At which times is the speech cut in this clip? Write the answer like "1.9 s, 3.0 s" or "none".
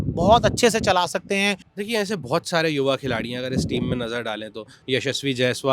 1.7 s, 4.8 s